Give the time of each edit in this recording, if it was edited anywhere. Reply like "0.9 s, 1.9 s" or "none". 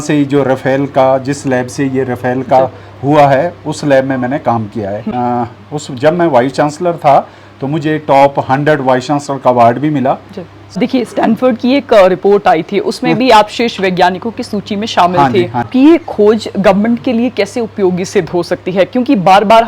5.1 s, 10.8 s, 15.7 s